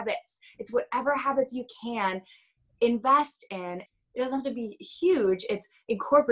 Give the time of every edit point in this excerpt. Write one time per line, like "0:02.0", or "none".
0:03.8